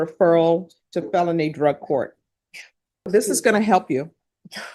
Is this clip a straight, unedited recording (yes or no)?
no